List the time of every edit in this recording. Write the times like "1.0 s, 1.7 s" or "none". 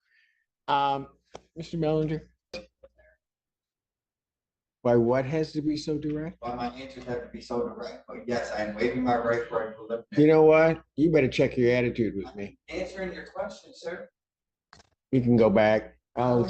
2.5 s